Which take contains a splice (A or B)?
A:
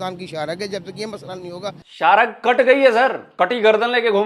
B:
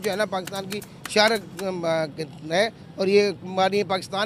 A